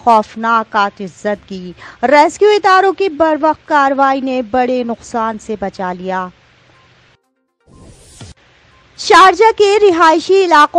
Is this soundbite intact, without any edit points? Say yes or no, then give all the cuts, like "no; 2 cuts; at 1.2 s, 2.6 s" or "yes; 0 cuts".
no; 1 cut; at 7.3 s